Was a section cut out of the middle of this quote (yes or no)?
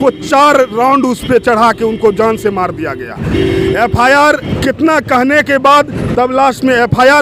no